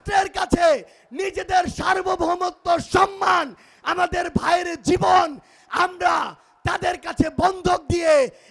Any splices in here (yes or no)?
no